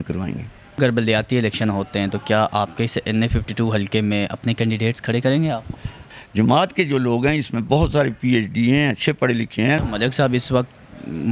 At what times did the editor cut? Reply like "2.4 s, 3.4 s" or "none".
0.8 s, 6.0 s, 9.8 s